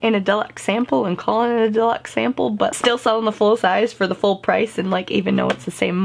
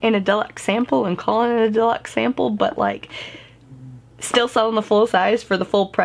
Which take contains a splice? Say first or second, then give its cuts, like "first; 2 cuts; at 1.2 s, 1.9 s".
first; 1 cut; at 2.7 s